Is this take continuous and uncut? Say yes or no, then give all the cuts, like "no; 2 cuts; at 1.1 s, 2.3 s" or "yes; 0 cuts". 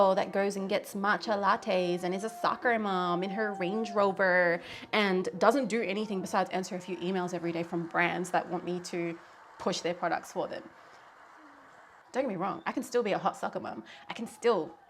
no; 1 cut; at 12.0 s